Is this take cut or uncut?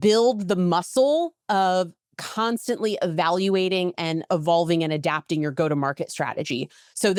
uncut